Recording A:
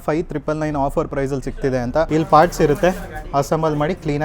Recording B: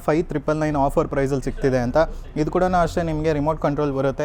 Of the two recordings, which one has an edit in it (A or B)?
A